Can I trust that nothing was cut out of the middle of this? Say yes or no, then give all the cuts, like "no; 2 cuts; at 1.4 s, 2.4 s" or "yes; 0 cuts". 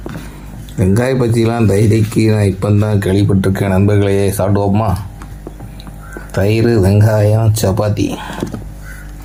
yes; 0 cuts